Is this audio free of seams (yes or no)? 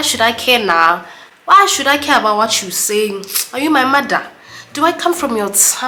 yes